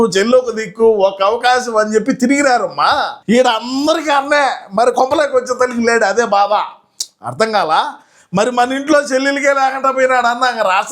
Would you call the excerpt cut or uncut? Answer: cut